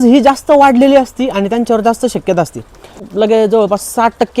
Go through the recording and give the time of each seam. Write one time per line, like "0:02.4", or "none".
0:03.1